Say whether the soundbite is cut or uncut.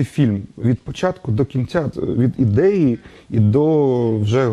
cut